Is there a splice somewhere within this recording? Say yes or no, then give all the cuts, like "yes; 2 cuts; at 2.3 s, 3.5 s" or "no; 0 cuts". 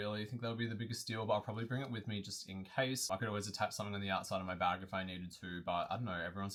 no; 0 cuts